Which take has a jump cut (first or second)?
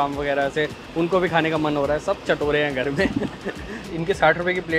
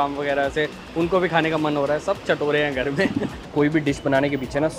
second